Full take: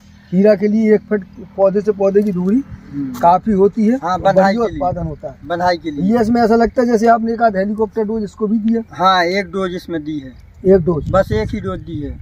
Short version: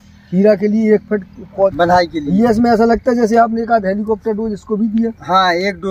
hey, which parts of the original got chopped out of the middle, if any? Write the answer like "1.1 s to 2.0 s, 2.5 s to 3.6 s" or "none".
1.7 s to 5.4 s